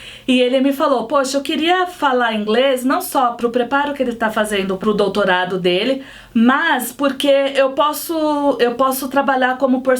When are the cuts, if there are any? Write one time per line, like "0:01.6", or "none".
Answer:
0:03.3
0:04.8